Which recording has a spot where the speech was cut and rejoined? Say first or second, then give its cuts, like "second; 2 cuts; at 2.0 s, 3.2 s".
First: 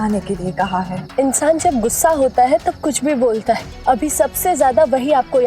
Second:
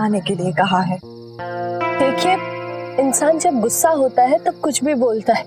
first; 2 cuts; at 1.0 s, 3.7 s